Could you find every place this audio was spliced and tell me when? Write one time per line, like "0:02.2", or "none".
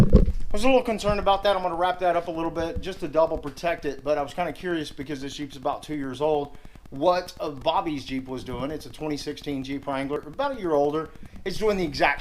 0:10.2